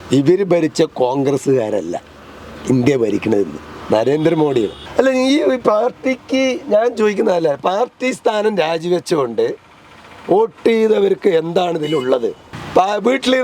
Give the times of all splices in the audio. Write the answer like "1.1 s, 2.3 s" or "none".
4.8 s, 12.5 s